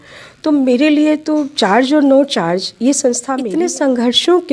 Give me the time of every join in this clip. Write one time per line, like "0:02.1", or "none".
0:03.3

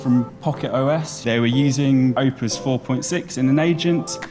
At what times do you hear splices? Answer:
0:01.1
0:02.2

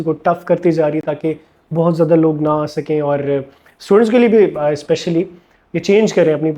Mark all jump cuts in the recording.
none

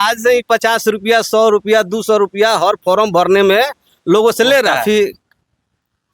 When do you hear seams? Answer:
0:04.8

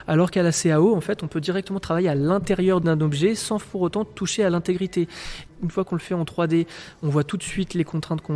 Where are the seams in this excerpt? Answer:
0:02.8
0:05.4

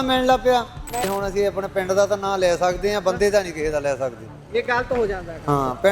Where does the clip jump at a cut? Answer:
0:01.1

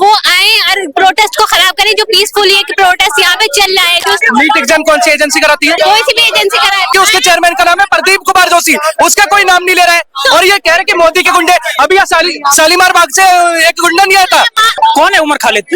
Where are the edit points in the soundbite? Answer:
0:04.2
0:05.8
0:06.9
0:14.7

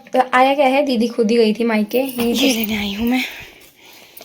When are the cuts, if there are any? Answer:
0:02.4

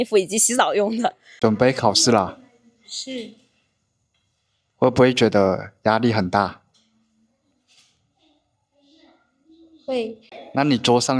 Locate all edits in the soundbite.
0:01.2

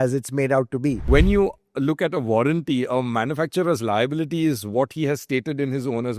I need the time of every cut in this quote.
0:01.0

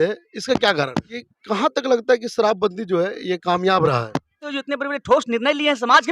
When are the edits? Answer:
0:01.2
0:04.5

